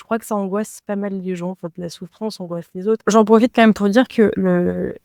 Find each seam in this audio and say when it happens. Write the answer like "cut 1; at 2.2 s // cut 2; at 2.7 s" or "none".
cut 1; at 3.0 s

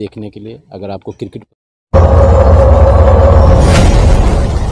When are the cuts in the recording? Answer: cut 1; at 1.5 s

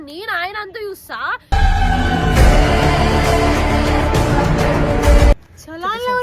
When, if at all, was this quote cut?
cut 1; at 5.3 s

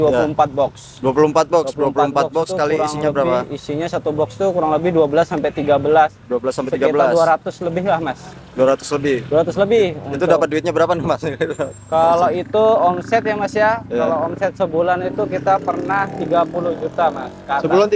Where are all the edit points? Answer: none

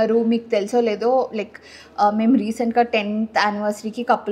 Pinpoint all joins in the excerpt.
none

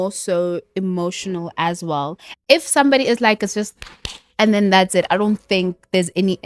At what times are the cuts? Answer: cut 1; at 2.2 s

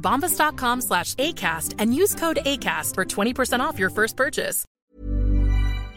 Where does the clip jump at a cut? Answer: cut 1; at 4.6 s

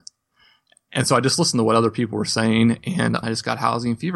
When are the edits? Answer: cut 1; at 3.2 s

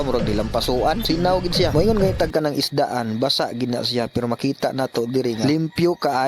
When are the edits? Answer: cut 1; at 1.0 s

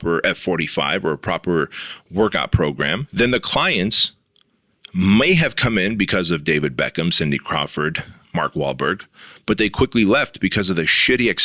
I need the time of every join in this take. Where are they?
cut 1; at 3.0 s

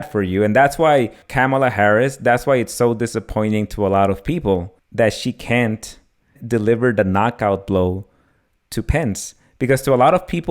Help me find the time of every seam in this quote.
cut 1; at 1.2 s // cut 2; at 4.8 s // cut 3; at 6.4 s

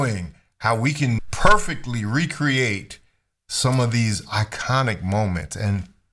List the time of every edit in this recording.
cut 1; at 1.3 s

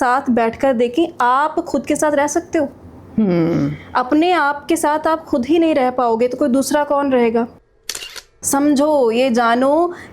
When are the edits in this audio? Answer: cut 1; at 7.9 s

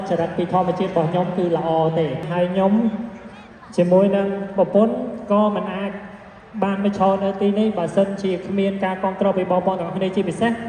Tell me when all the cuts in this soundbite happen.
cut 1; at 2.3 s

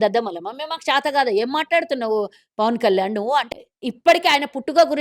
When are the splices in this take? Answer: cut 1; at 3.5 s

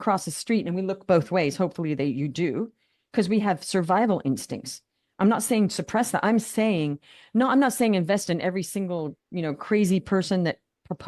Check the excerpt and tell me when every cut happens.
none

